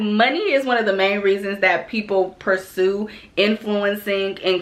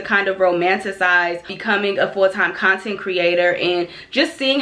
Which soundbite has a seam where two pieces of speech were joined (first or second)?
second